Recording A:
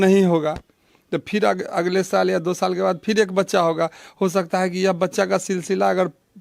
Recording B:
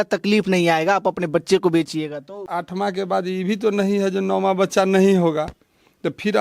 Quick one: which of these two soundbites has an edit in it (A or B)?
B